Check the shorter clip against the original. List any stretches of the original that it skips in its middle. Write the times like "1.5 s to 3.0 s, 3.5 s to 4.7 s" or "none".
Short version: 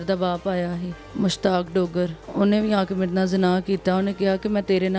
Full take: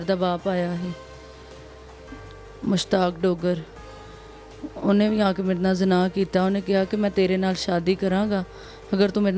1.0 s to 2.4 s, 3.7 s to 4.7 s